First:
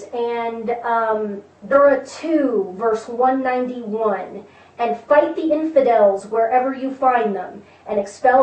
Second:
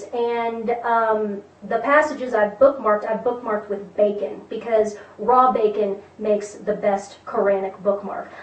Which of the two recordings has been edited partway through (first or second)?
second